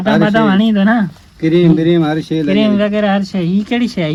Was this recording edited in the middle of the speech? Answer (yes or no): no